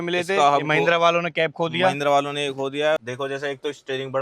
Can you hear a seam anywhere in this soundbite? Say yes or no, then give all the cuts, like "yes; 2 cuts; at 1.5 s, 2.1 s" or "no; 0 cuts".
yes; 1 cut; at 3.0 s